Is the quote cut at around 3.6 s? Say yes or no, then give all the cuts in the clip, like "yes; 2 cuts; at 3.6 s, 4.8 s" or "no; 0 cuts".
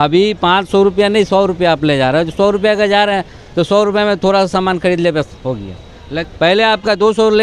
no; 1 cut; at 6.2 s